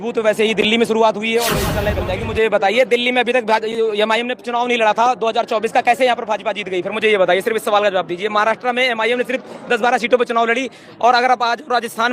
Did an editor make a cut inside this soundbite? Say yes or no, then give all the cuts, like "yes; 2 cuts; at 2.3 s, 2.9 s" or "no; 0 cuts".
yes; 1 cut; at 1.9 s